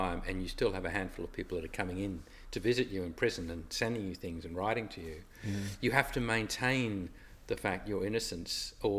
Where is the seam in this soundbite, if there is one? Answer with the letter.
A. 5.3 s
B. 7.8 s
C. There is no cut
C